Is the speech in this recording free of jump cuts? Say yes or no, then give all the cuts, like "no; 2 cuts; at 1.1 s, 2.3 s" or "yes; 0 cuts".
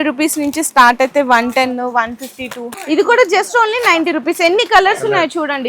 no; 1 cut; at 2.8 s